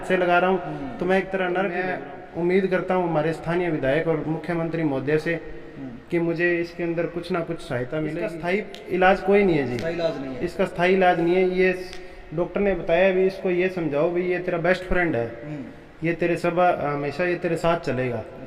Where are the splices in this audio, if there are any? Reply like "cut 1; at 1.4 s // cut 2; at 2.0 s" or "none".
cut 1; at 1.9 s // cut 2; at 8.4 s